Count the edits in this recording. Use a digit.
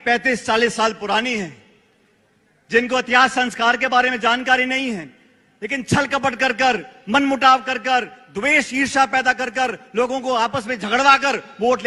0